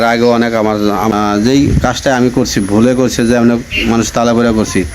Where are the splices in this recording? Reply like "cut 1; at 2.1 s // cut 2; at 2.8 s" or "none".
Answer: cut 1; at 1.1 s